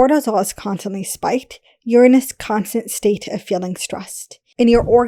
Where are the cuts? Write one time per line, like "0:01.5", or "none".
none

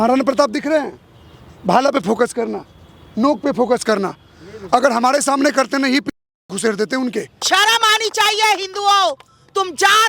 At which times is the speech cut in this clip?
0:07.4

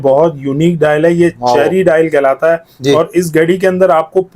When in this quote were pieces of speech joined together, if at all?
none

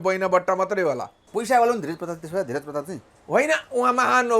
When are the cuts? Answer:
0:01.2

